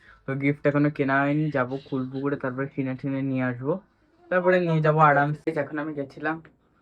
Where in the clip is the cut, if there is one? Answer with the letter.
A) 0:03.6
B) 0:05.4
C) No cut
B